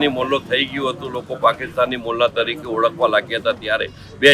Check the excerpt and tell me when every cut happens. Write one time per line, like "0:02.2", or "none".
none